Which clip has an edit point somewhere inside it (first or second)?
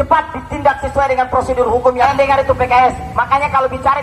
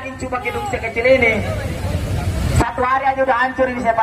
first